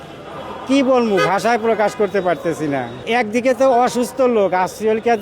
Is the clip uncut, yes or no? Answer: no